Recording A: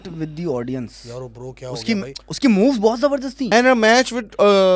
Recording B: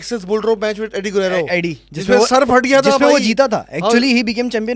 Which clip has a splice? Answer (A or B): A